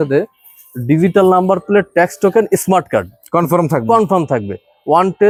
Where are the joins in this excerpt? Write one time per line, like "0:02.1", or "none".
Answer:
none

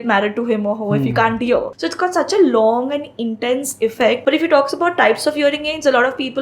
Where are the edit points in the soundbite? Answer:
0:01.8
0:04.2

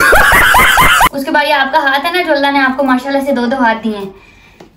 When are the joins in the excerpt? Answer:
0:01.1

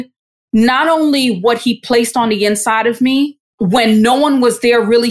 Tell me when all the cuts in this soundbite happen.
0:03.4

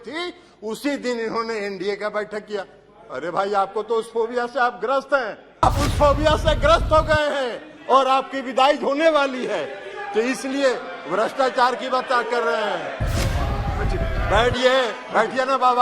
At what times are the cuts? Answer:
0:05.6

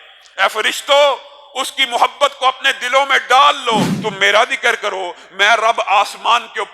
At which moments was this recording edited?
0:03.9

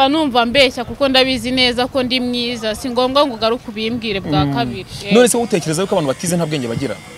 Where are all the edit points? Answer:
none

